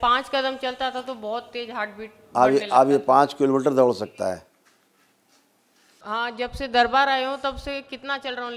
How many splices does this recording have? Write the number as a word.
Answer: zero